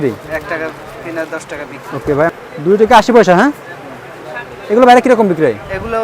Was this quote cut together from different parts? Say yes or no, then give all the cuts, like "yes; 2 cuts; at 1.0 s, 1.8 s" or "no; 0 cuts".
yes; 1 cut; at 2.3 s